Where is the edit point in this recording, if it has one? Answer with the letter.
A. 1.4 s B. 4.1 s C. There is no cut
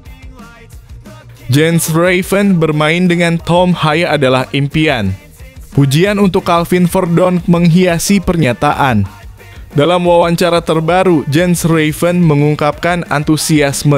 A